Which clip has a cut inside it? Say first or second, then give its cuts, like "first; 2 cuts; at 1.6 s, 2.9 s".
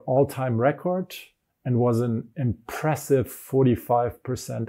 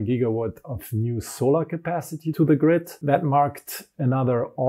second; 1 cut; at 2.9 s